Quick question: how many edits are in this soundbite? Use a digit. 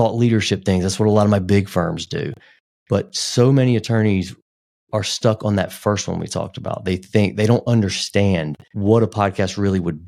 0